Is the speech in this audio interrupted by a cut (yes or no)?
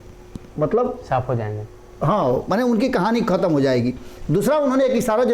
no